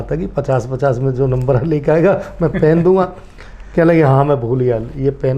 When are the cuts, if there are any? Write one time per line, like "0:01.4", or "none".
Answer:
none